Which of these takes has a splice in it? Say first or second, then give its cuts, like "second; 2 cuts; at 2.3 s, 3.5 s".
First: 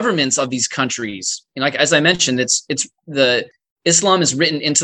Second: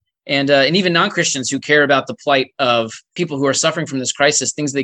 second; 1 cut; at 3.1 s